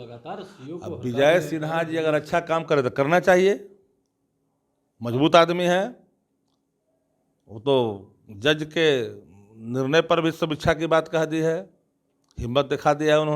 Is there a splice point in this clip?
no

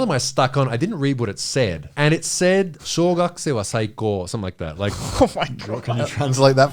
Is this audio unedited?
no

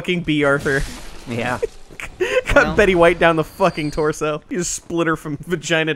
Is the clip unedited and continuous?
no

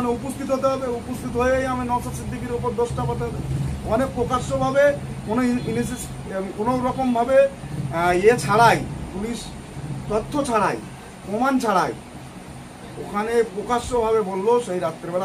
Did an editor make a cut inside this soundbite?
no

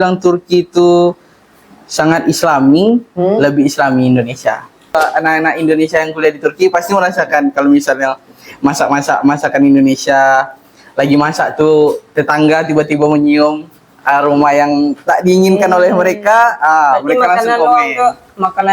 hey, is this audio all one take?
no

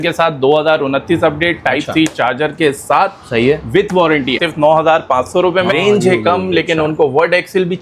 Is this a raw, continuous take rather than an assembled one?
no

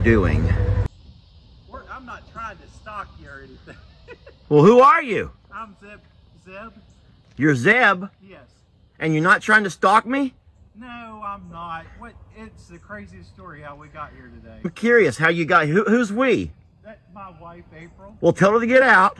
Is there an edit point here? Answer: yes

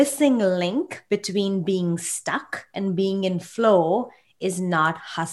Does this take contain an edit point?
no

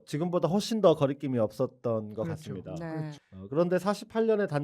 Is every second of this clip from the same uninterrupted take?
no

